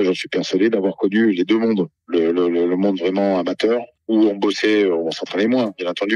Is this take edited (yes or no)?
no